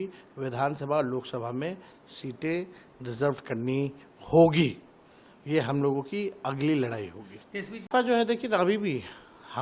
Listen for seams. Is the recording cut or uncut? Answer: uncut